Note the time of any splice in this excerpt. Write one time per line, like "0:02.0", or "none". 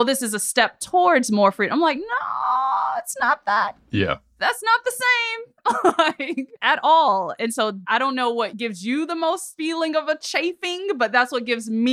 none

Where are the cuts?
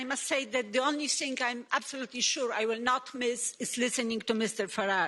none

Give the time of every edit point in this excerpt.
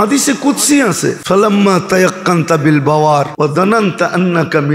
0:01.2
0:03.3

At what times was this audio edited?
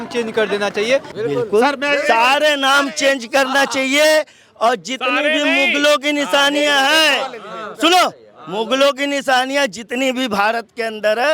0:01.1

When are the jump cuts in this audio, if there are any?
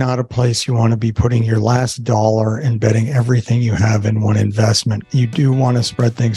0:05.0

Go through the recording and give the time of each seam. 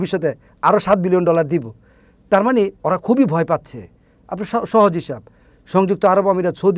none

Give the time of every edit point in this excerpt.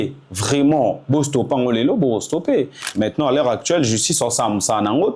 0:02.8

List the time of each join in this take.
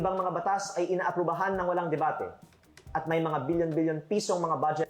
none

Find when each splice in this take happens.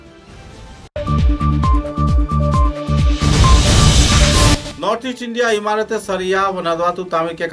0:00.9
0:04.5

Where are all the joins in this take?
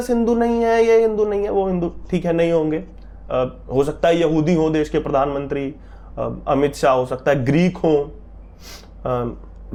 none

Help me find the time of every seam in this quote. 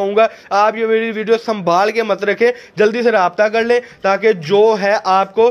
none

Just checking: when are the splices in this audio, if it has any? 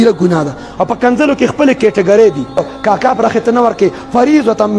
0:02.6

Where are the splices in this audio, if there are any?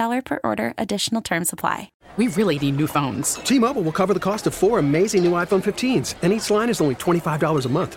0:02.0

